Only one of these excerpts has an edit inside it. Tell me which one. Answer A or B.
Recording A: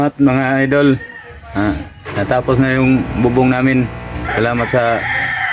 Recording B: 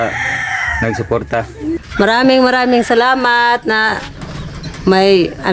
B